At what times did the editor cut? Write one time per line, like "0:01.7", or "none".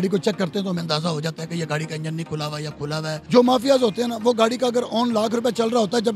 0:03.2